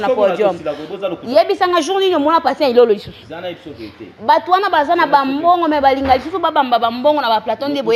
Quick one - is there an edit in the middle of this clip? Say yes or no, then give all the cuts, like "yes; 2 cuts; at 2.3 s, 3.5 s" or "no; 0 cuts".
no; 0 cuts